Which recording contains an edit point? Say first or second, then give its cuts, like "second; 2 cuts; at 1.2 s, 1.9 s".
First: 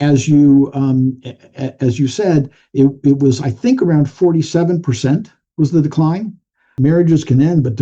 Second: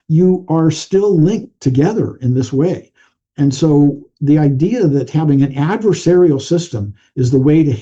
first; 1 cut; at 6.8 s